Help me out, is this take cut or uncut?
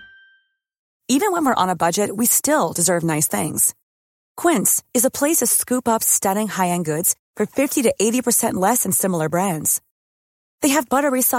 cut